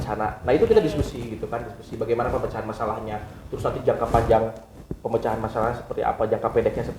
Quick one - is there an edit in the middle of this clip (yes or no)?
no